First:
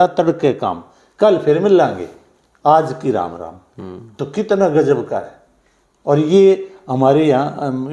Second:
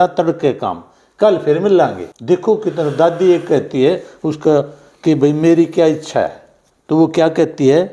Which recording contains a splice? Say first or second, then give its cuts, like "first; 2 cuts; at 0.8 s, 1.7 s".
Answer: second; 1 cut; at 2.1 s